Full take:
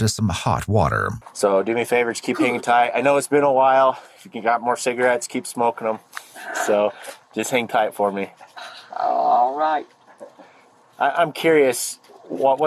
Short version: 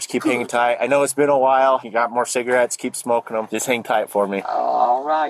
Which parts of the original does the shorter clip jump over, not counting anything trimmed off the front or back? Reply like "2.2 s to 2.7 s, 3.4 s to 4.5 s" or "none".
4.1 s to 4.5 s, 6.0 s to 7.3 s, 8.3 s to 9.0 s